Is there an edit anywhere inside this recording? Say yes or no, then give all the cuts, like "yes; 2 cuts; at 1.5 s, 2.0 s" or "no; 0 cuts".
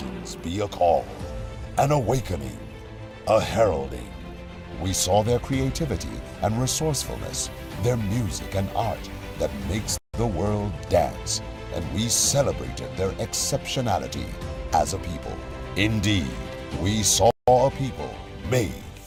no; 0 cuts